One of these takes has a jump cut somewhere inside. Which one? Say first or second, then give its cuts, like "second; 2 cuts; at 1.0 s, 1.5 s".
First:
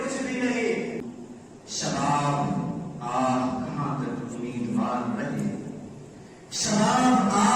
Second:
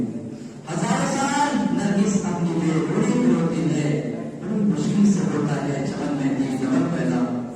first; 1 cut; at 1.0 s